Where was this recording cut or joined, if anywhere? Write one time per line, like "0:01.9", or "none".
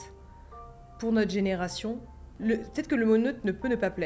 0:02.2